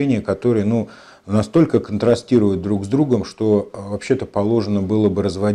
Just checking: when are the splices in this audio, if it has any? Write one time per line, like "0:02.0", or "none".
none